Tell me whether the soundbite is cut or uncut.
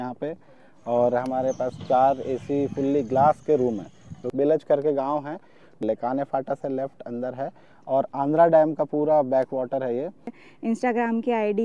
cut